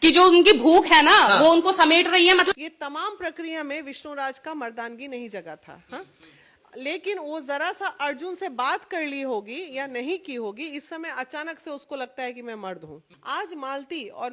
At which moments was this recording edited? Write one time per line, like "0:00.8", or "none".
0:02.5
0:13.1